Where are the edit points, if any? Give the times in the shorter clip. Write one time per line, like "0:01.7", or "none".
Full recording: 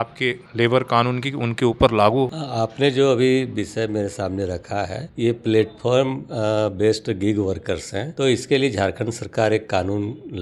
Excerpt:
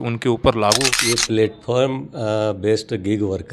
0:01.0